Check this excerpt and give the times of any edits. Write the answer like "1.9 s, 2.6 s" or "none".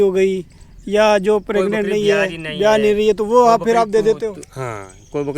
none